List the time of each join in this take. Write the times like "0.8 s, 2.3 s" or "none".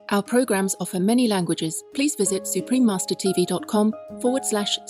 1.8 s